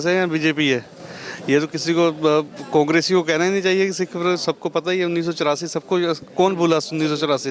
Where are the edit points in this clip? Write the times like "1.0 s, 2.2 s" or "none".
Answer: none

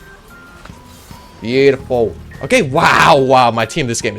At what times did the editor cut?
2.3 s

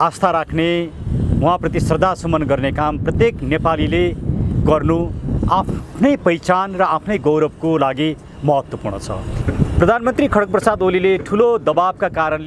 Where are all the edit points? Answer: 9.4 s

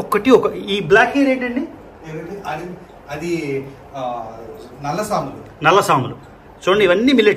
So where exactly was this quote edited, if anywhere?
none

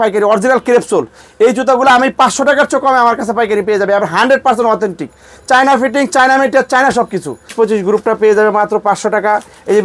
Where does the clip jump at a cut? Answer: 7.5 s

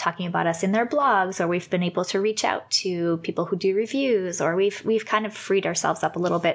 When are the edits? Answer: none

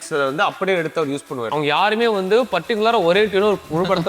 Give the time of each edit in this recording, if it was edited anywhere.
1.5 s

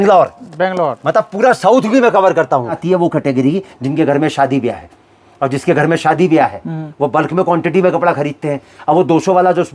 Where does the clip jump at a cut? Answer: 2.8 s

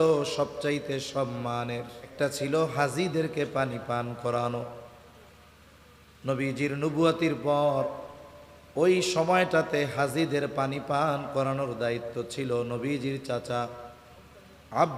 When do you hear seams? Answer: 2.1 s

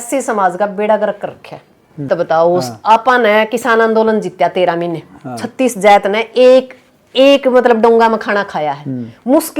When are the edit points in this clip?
2.1 s

